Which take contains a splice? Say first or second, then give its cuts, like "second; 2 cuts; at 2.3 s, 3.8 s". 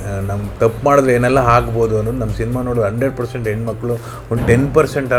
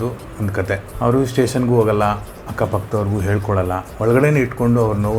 second; 2 cuts; at 0.9 s, 3.9 s